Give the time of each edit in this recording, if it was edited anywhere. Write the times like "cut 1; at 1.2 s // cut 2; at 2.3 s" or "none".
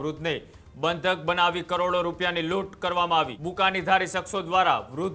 cut 1; at 3.4 s